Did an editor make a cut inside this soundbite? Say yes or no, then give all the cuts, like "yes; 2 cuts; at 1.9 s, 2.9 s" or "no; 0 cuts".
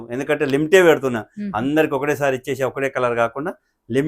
no; 0 cuts